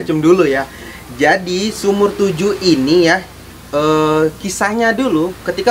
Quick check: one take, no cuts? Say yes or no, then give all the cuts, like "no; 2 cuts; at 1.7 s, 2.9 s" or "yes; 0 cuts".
yes; 0 cuts